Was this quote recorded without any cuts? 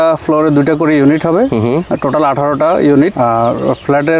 no; 2 cuts; at 1.9 s, 3.1 s

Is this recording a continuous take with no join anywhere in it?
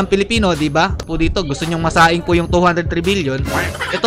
no; 1 cut; at 1.1 s

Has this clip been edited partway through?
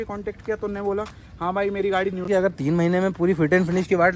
yes; 1 cut; at 2.3 s

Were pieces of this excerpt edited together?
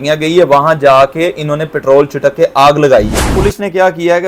yes; 1 cut; at 3.3 s

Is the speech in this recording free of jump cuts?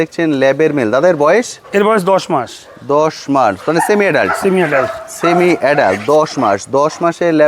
yes; 0 cuts

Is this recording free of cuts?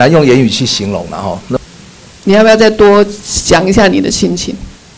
no; 1 cut; at 1.6 s

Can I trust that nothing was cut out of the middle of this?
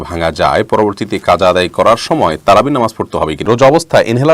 no; 1 cut; at 3.4 s

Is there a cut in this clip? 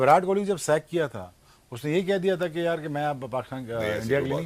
no; 0 cuts

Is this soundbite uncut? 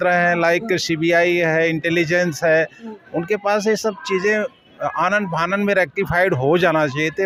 yes; 0 cuts

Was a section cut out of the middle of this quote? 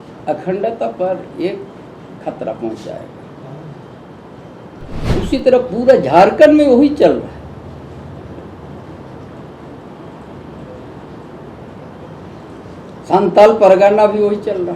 yes; 1 cut; at 5.1 s

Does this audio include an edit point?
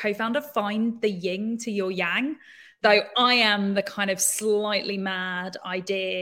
no; 0 cuts

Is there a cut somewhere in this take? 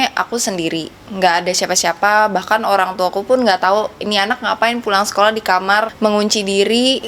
yes; 1 cut; at 5.9 s

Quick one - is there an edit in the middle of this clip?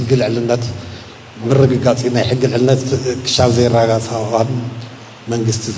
no; 0 cuts

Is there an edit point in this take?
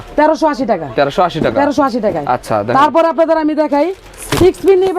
no; 0 cuts

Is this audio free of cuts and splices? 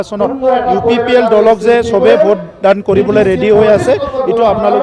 yes; 0 cuts

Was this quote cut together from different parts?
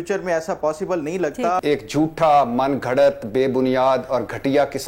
yes; 1 cut; at 1.6 s

